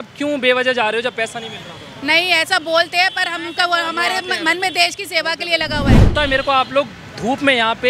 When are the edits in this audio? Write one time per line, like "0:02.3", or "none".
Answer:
0:06.1